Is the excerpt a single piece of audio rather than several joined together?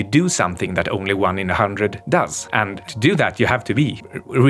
no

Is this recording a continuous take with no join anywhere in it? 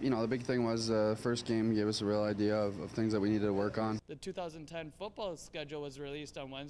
no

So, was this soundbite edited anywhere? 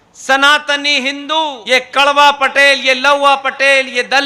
yes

